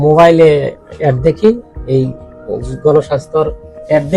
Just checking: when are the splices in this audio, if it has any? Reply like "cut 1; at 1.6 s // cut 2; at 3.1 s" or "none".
none